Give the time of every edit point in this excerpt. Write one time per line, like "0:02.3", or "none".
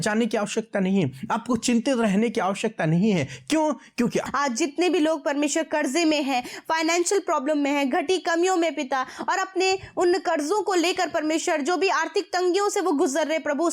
0:04.3

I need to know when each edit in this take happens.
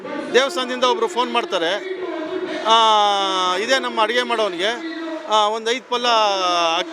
none

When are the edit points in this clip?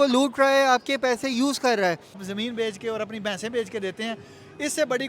0:02.3

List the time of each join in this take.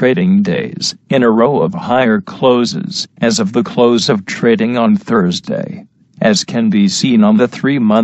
0:04.0

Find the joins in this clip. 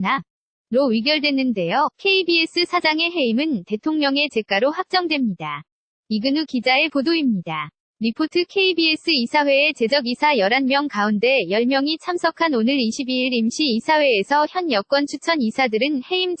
none

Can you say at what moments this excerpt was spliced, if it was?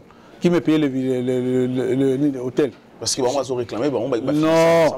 none

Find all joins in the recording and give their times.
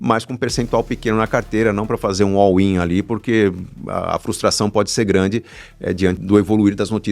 0:06.2

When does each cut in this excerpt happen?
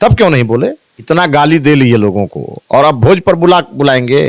0:00.9

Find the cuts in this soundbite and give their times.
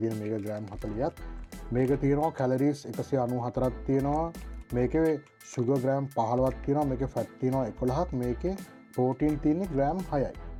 none

